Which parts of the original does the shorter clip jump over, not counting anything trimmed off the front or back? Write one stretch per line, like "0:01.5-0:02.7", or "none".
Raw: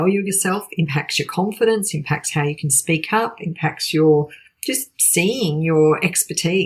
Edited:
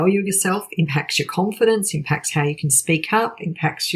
none